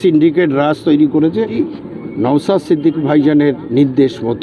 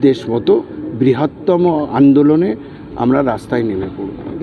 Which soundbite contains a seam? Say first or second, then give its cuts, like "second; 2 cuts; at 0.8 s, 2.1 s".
first; 1 cut; at 1.6 s